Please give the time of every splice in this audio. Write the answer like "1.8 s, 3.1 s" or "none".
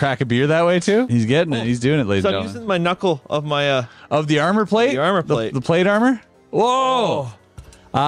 1.1 s